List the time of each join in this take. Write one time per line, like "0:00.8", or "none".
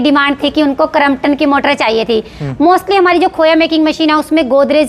none